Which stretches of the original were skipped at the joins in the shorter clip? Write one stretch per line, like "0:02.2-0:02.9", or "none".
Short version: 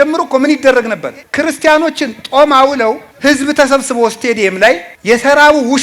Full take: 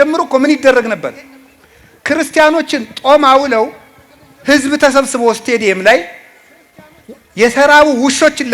0:01.2-0:01.9
0:03.8-0:04.3
0:06.1-0:07.2